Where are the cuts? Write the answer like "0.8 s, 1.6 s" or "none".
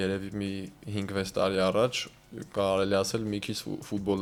none